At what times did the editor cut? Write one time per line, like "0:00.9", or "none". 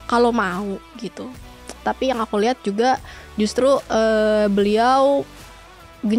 none

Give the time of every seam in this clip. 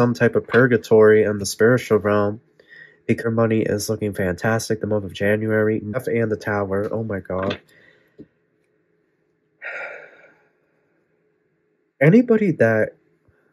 0:03.2
0:06.0

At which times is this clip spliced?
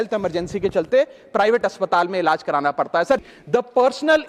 0:03.2

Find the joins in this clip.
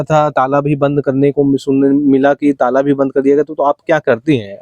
none

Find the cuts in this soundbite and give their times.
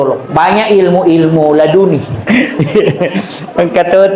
0:02.3

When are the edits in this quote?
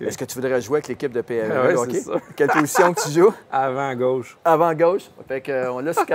0:05.2

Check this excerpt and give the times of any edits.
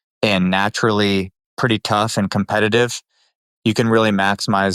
0:03.3

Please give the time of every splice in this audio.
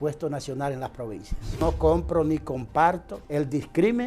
0:01.6
0:03.2

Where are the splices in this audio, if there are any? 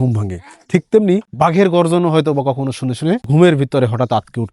0:01.3
0:03.2

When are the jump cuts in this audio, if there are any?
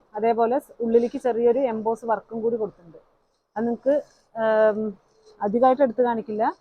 none

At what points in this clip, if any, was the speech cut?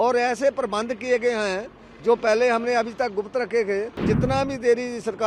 0:04.0

